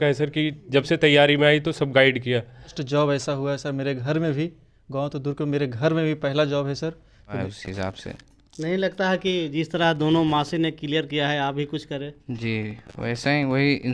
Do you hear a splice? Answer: yes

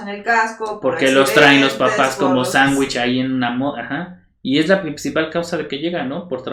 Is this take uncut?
yes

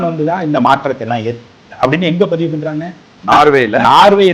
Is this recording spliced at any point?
yes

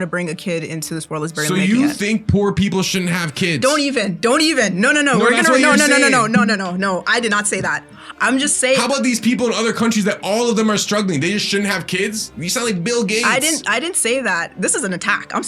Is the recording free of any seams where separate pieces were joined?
yes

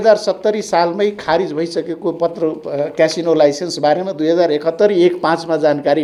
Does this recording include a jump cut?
no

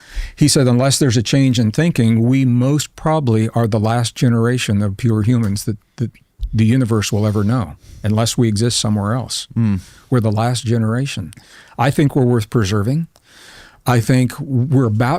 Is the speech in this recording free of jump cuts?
yes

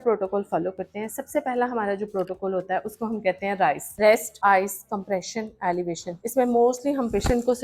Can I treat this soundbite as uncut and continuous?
yes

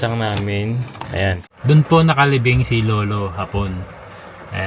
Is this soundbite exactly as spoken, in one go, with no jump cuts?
no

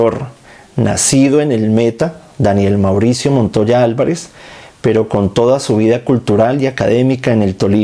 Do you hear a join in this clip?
no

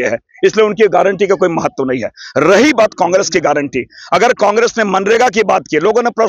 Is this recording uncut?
yes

